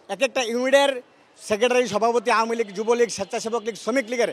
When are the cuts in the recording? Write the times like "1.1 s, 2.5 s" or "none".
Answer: none